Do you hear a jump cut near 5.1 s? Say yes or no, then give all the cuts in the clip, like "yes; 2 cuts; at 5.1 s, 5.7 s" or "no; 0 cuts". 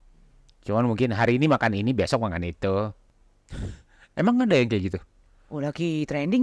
no; 1 cut; at 3.1 s